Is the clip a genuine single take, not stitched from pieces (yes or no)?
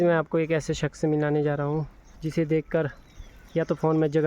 no